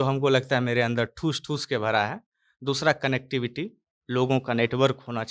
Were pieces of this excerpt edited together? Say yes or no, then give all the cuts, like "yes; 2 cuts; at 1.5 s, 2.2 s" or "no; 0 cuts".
no; 0 cuts